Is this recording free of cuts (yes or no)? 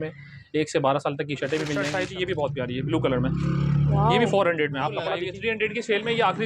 no